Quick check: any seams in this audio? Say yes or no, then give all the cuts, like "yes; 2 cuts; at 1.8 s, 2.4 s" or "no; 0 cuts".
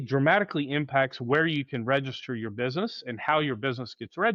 no; 0 cuts